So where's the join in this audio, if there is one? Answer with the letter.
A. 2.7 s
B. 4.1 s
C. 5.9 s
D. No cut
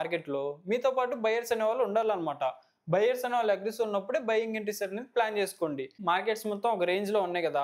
C